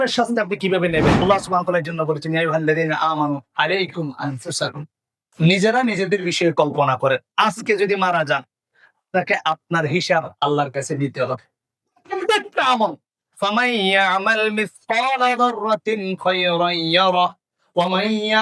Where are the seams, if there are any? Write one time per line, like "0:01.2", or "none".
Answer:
0:01.2